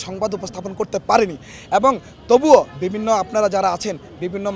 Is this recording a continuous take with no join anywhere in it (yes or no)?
yes